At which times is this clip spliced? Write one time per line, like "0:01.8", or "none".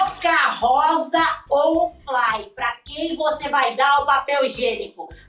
none